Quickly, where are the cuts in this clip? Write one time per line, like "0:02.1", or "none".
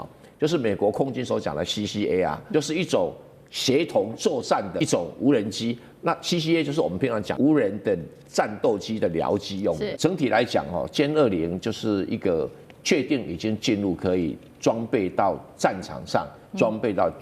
0:02.4
0:04.8
0:07.3
0:09.9